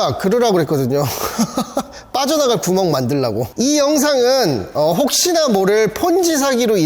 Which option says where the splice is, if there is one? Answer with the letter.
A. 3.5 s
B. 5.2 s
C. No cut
A